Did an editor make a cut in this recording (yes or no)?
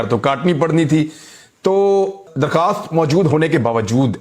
yes